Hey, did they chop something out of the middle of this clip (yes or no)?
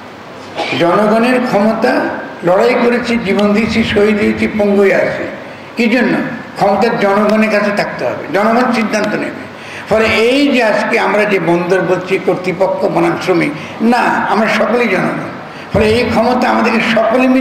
no